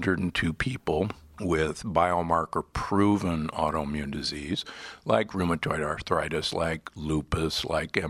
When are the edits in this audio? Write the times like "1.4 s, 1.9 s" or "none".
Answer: 1.2 s, 6.0 s